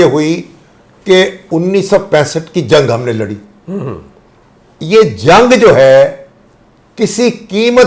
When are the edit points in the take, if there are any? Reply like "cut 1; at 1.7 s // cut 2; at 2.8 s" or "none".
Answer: none